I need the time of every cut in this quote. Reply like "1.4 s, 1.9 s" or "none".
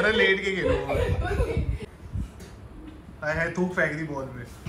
1.8 s